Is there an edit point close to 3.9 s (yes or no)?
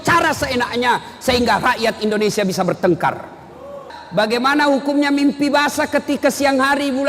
yes